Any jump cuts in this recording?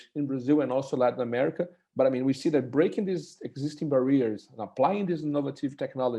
no; 0 cuts

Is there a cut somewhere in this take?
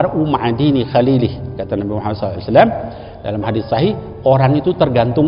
no; 0 cuts

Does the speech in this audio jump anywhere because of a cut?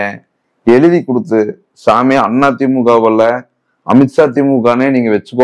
no; 0 cuts

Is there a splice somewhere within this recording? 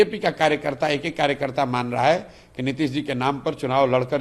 no; 0 cuts

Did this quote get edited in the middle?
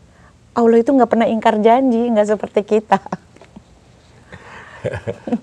no; 0 cuts

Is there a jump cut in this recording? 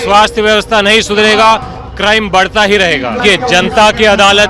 yes; 1 cut; at 3.2 s

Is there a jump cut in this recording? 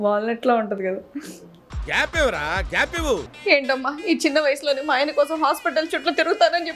yes; 1 cut; at 3.2 s

